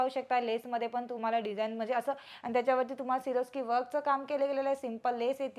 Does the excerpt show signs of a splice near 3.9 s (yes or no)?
no